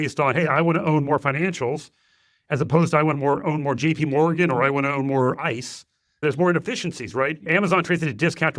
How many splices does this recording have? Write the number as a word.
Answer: two